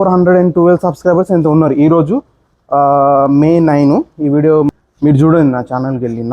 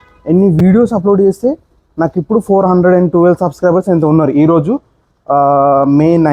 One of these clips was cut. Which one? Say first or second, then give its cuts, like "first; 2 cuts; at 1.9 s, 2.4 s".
first; 1 cut; at 4.7 s